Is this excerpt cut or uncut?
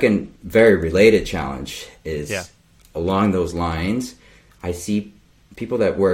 cut